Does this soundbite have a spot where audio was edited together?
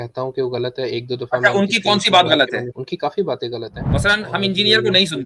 yes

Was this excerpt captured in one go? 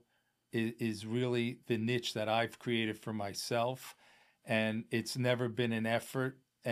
yes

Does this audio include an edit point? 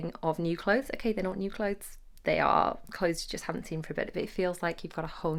no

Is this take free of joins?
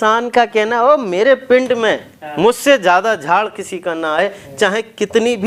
yes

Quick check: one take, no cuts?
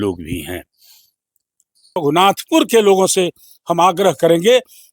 no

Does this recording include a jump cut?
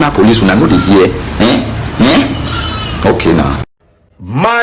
no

